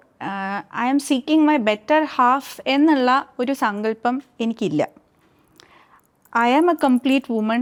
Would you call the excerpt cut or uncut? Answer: uncut